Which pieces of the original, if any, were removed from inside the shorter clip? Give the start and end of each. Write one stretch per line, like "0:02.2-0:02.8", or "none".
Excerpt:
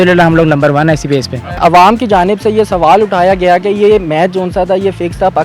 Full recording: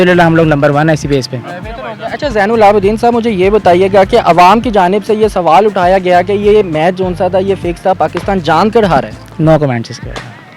0:01.6-0:04.2